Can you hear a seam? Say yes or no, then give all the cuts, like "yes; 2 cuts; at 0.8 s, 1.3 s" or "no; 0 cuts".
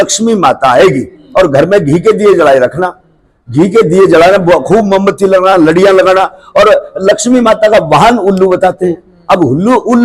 no; 0 cuts